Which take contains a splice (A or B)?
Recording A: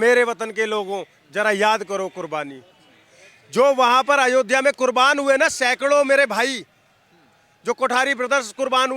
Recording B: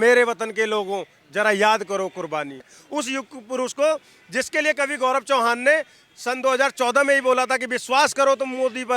B